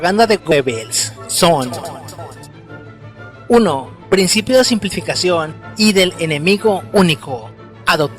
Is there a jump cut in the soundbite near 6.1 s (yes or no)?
yes